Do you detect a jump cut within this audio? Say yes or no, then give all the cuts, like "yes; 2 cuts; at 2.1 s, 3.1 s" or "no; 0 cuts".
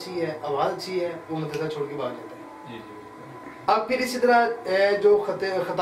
no; 0 cuts